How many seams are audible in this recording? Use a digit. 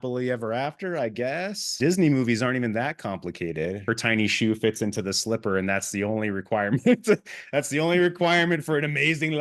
2